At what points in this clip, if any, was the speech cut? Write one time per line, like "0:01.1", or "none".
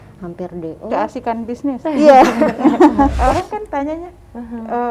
0:03.1